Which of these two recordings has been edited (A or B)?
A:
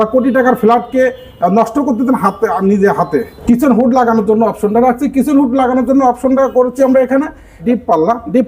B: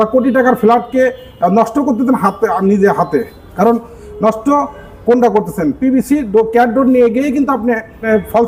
A